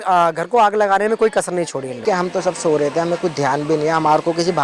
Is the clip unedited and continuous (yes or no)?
no